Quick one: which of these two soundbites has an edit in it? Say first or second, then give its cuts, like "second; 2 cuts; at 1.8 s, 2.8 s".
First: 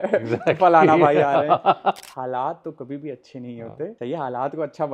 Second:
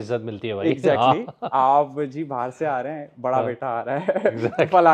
first; 2 cuts; at 2.0 s, 3.9 s